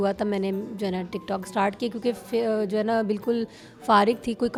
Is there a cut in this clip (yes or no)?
no